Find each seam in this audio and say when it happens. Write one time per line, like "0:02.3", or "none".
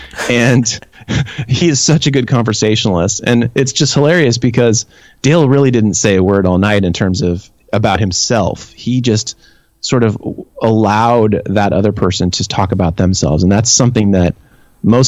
none